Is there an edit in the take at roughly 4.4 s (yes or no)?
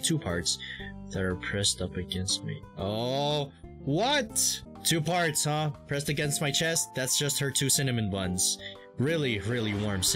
yes